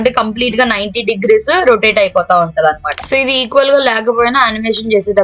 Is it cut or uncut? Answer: cut